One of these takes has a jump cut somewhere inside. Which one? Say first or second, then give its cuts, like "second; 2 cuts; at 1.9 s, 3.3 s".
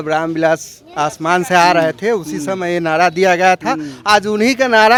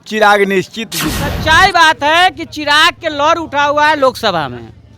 second; 1 cut; at 1.3 s